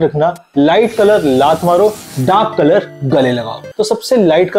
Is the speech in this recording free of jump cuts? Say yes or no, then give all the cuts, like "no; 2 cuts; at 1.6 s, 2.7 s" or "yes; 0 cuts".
no; 1 cut; at 3.6 s